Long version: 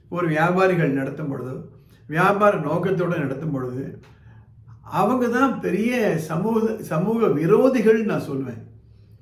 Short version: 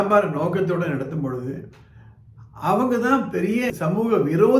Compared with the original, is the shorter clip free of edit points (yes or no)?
no